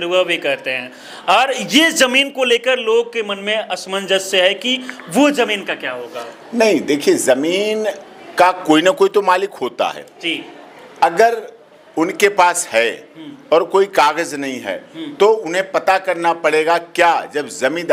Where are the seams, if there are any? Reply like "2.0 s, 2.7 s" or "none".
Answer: none